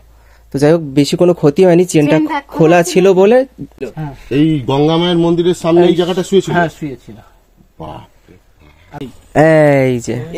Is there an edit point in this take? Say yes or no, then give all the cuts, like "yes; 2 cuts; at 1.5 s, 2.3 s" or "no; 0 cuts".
yes; 2 cuts; at 3.7 s, 9.0 s